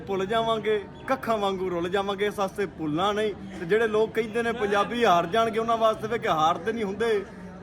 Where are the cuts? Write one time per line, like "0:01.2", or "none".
none